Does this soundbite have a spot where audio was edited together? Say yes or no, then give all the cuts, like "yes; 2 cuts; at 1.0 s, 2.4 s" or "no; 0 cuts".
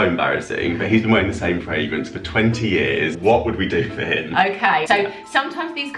yes; 2 cuts; at 3.2 s, 4.8 s